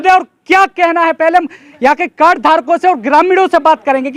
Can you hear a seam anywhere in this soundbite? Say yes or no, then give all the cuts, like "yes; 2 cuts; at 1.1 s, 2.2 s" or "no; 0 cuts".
no; 0 cuts